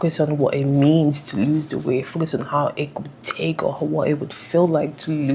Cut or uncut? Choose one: uncut